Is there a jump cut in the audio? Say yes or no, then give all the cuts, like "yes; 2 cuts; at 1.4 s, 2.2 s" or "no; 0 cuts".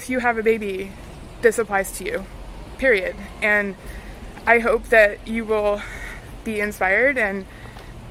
no; 0 cuts